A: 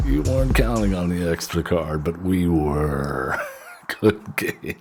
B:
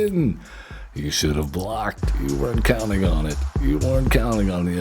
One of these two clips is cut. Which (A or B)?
B